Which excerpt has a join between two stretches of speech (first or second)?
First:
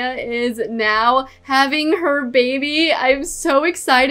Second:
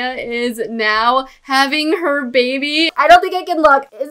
second